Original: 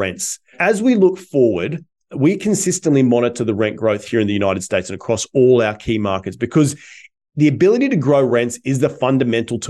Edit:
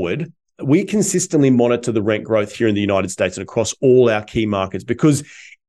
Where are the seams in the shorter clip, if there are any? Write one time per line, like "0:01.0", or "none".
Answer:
none